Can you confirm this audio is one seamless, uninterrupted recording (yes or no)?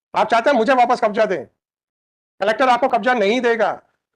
yes